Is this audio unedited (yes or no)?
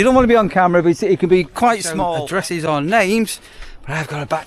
no